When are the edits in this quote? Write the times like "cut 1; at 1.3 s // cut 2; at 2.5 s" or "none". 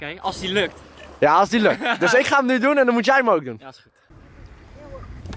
cut 1; at 3.9 s